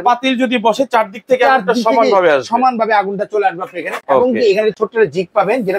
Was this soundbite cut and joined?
no; 0 cuts

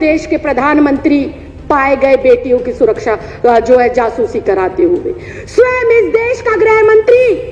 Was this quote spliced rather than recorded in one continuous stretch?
no; 0 cuts

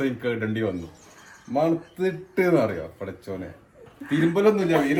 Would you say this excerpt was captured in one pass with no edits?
yes; 0 cuts

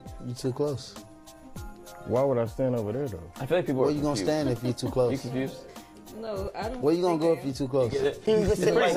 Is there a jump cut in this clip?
yes; 1 cut; at 4.2 s

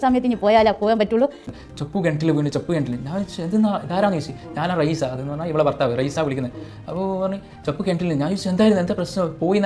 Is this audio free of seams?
no; 1 cut; at 1.5 s

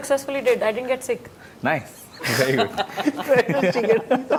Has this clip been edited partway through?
no; 0 cuts

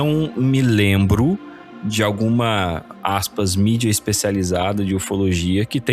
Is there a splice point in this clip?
no; 0 cuts

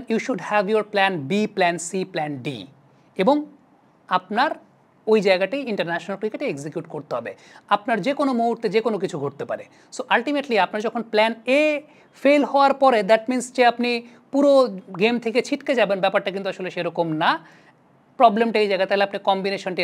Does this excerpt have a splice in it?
no; 0 cuts

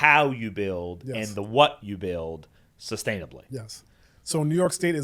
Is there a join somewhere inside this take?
no; 0 cuts

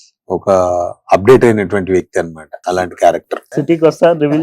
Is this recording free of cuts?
no; 2 cuts; at 2.5 s, 3.4 s

